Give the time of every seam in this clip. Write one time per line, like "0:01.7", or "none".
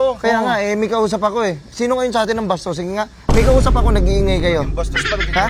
none